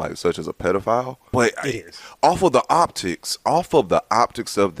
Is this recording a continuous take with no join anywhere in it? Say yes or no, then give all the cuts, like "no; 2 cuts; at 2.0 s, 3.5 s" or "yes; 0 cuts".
no; 1 cut; at 1.2 s